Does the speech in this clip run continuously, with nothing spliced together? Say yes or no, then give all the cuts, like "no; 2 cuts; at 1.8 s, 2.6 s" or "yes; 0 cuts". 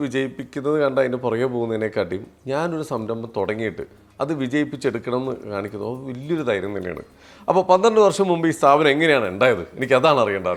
yes; 0 cuts